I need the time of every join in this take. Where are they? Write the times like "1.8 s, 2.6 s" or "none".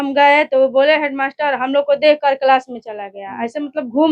none

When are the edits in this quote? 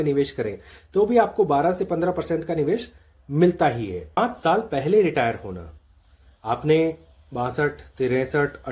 4.2 s

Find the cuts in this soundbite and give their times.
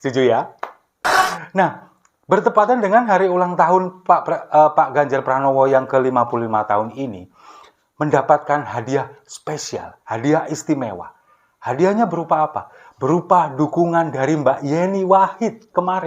1.0 s

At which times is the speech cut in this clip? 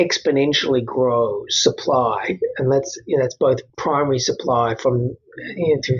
3.7 s

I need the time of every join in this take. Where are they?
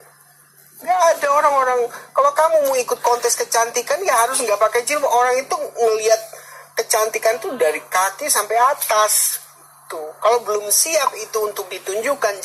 none

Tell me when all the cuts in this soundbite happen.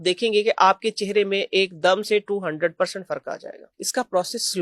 3.6 s

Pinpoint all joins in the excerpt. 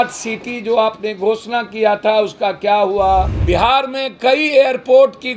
3.4 s

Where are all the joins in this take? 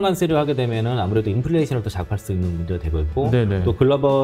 none

